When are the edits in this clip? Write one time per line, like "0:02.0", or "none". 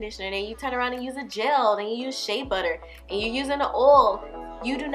none